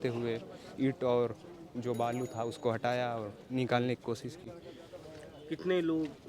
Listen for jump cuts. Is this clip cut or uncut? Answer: uncut